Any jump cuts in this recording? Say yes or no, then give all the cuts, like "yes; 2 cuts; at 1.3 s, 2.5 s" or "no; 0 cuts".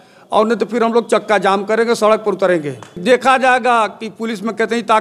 yes; 1 cut; at 2.9 s